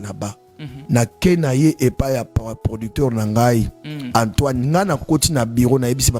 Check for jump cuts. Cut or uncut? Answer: uncut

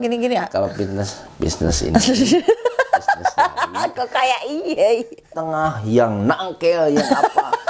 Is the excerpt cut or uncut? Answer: cut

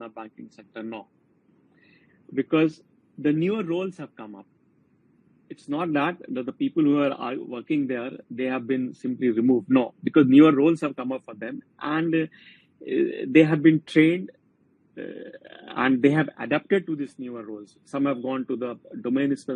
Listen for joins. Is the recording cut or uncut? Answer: uncut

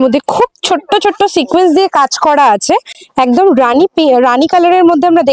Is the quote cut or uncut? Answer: uncut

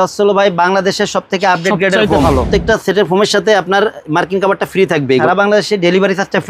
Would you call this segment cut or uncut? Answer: cut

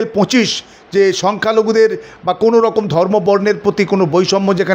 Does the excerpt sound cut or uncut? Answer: uncut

